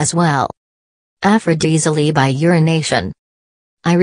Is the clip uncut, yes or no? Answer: yes